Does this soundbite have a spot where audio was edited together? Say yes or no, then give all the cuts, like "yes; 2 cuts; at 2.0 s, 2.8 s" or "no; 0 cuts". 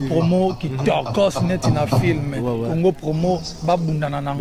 no; 0 cuts